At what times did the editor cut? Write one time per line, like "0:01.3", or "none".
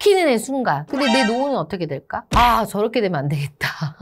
0:00.9
0:02.3